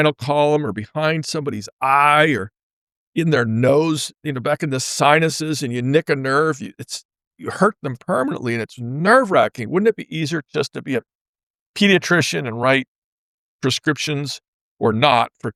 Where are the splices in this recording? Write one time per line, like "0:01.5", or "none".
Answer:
none